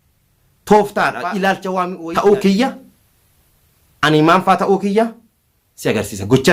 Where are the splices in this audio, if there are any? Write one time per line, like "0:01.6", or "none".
0:02.0